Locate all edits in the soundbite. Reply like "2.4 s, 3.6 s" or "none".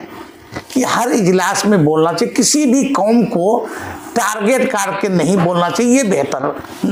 none